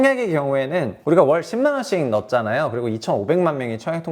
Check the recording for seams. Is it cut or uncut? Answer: cut